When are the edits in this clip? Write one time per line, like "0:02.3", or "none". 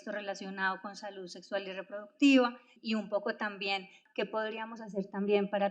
0:02.7
0:04.0